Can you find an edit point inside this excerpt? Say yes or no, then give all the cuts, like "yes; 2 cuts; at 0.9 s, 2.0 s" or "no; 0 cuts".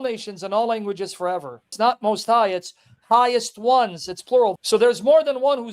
yes; 2 cuts; at 1.7 s, 4.6 s